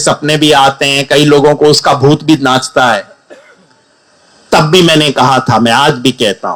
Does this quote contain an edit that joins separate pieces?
no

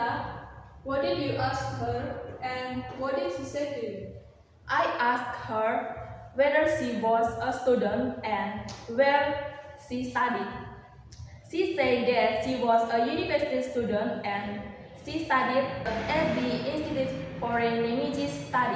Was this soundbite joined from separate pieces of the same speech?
yes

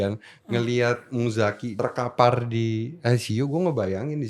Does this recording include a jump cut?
yes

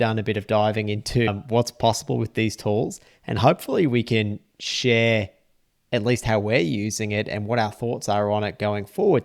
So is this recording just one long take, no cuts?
yes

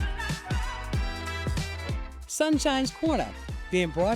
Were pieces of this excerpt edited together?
yes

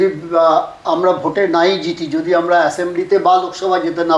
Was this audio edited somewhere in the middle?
no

